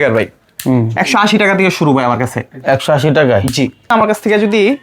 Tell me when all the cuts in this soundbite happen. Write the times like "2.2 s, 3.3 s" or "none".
3.9 s